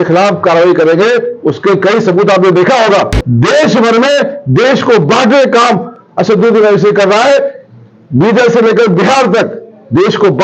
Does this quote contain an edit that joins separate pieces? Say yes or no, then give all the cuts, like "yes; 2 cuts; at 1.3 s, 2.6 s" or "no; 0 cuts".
yes; 1 cut; at 3.2 s